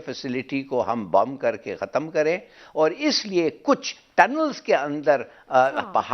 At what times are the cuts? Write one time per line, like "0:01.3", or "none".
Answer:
none